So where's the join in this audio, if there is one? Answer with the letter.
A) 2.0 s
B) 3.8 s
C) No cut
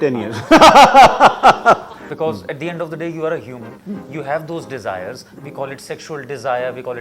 A